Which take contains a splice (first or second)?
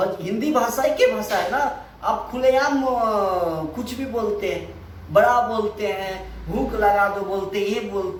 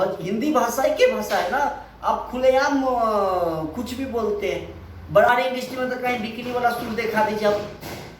second